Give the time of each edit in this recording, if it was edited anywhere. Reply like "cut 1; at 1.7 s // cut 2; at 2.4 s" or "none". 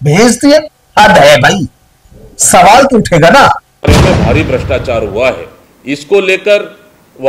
cut 1; at 3.9 s